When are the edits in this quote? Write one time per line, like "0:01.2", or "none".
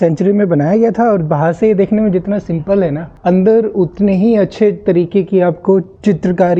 none